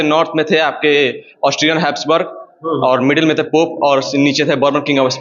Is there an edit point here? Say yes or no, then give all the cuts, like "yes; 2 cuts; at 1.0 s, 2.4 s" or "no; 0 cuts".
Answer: no; 0 cuts